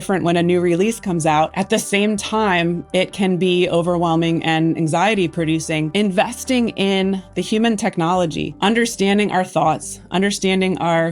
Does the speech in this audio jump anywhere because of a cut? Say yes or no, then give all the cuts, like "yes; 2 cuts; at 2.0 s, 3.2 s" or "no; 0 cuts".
yes; 2 cuts; at 1.6 s, 5.9 s